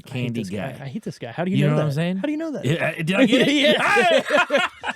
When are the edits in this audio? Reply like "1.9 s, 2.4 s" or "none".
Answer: none